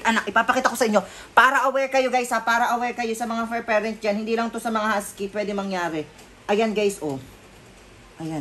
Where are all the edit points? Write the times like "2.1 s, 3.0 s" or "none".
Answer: none